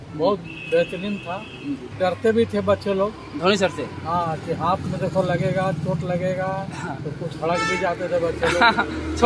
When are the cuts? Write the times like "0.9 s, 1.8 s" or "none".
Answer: 1.9 s, 7.0 s